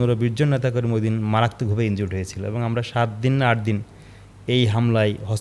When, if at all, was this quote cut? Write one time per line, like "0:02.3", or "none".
none

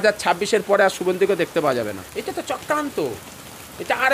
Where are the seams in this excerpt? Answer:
0:02.0

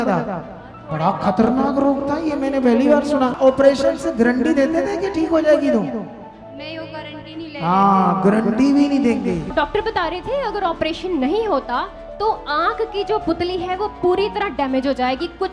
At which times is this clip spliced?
0:03.4
0:09.5

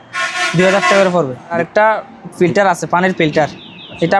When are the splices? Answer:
0:01.5

